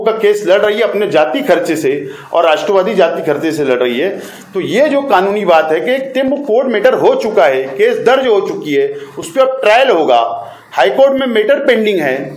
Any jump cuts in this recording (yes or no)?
no